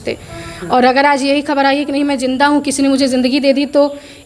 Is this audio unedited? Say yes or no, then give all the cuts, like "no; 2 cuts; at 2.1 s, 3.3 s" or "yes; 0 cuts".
yes; 0 cuts